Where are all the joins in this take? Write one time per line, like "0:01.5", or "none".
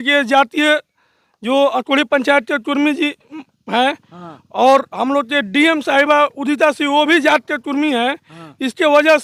none